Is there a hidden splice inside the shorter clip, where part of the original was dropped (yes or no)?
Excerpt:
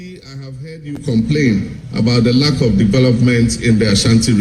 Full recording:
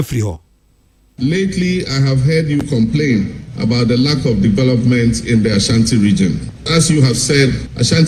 no